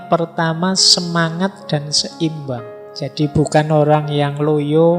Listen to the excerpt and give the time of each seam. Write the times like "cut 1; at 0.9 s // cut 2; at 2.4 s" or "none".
cut 1; at 2.8 s